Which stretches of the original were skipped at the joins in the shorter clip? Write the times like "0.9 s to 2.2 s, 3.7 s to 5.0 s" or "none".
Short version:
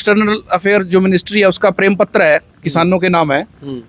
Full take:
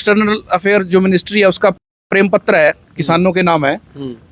1.8 s to 2.1 s